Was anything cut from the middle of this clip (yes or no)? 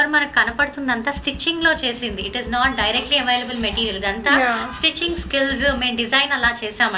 no